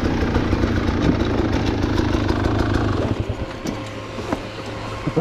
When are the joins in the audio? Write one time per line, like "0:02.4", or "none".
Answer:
none